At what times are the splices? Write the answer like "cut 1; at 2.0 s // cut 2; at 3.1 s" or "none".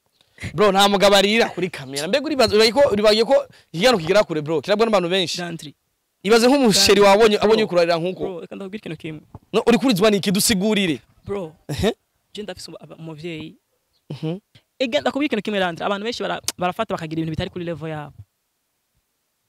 cut 1; at 14.5 s